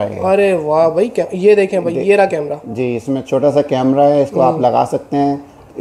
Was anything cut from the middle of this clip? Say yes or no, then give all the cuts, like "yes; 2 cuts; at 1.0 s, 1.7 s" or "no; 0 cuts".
no; 0 cuts